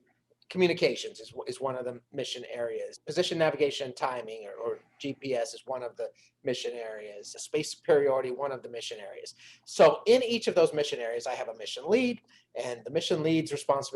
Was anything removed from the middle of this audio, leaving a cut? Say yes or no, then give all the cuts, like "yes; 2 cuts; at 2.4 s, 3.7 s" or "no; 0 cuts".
yes; 2 cuts; at 3.0 s, 7.4 s